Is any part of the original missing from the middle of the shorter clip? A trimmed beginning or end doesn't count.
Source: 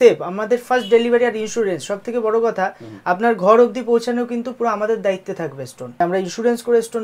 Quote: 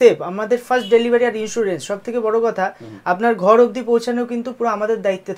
no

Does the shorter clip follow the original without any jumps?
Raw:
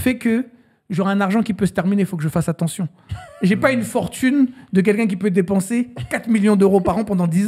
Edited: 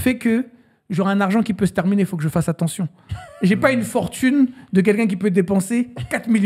yes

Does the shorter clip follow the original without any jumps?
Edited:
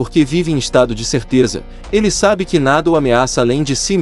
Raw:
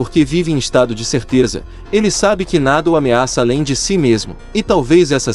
yes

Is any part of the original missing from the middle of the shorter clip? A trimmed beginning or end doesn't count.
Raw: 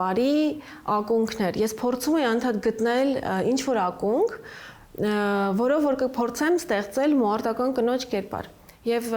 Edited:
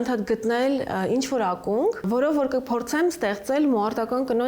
yes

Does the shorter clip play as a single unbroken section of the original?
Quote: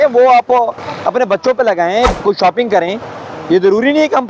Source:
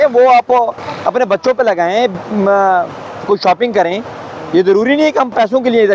no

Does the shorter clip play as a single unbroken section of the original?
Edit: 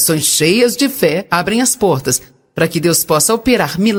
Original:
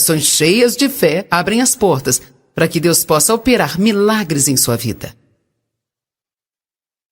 yes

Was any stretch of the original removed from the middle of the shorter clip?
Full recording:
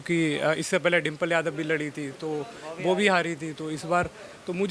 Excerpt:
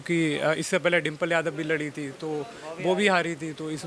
no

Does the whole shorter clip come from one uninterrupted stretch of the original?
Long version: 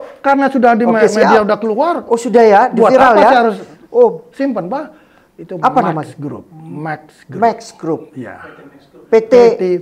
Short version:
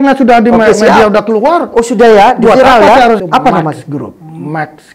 no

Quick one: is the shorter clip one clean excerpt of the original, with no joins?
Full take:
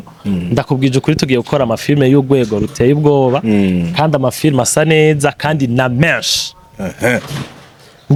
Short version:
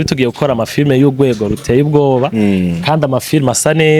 yes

